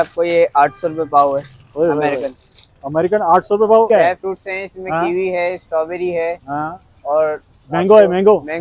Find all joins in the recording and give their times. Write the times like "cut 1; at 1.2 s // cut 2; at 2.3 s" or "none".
cut 1; at 3.9 s